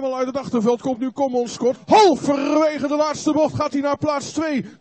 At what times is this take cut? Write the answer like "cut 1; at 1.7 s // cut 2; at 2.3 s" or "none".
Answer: cut 1; at 1.8 s